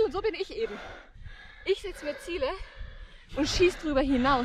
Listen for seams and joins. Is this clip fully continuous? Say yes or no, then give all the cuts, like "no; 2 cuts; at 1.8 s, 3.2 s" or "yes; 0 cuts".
yes; 0 cuts